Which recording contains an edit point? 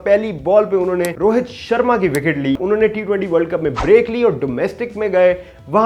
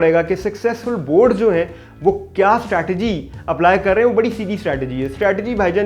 first; 2 cuts; at 1.1 s, 2.6 s

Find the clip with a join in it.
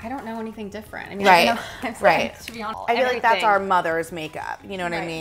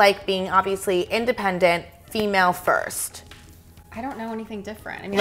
first; 1 cut; at 2.6 s

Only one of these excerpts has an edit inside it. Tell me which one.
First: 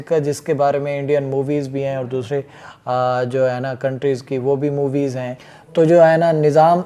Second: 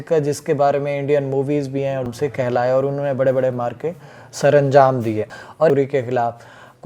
second; 2 cuts; at 2.1 s, 5.7 s

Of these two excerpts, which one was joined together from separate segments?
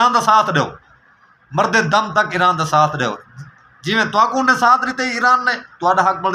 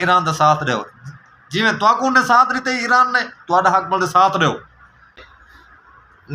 second; 1 cut; at 5.2 s

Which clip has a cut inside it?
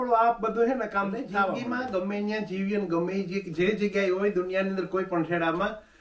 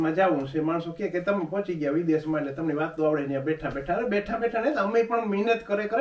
first; 1 cut; at 1.6 s

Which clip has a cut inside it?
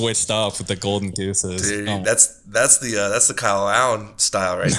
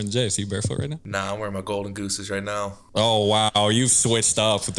second; 2 cuts; at 1.0 s, 2.8 s

